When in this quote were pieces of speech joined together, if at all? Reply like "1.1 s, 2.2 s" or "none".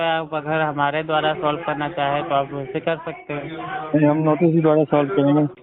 none